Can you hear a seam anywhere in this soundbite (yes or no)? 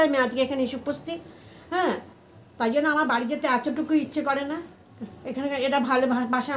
no